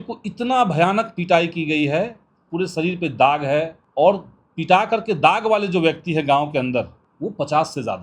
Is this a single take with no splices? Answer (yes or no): no